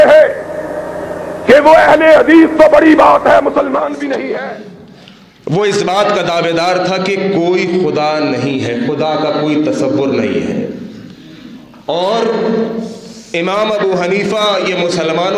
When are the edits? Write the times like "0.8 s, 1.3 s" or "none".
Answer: 4.6 s